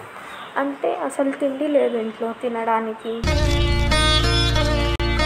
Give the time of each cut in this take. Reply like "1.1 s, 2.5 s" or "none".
none